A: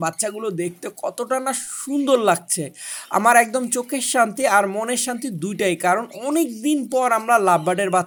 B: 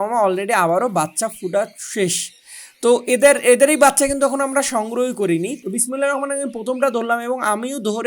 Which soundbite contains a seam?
B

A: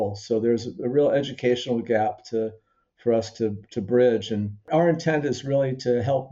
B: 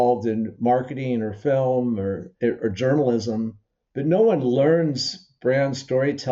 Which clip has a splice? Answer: A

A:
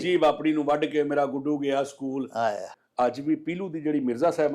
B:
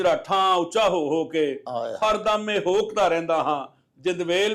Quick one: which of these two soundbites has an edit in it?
A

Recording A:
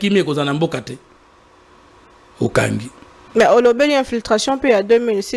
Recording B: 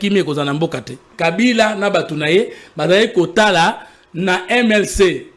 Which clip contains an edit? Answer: B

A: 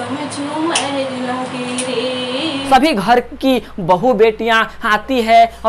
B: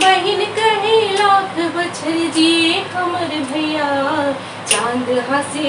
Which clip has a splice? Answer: A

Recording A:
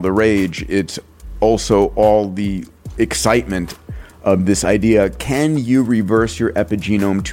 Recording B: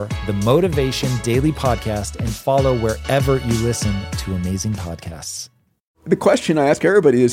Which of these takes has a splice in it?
B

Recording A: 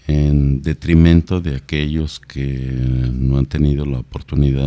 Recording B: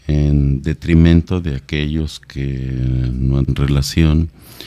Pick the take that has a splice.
A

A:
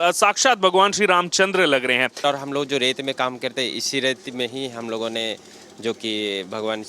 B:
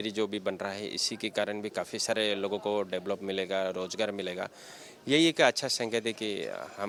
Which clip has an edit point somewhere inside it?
A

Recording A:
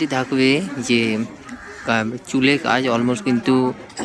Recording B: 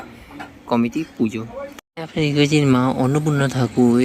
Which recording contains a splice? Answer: B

